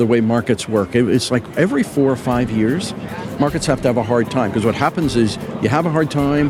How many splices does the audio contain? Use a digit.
0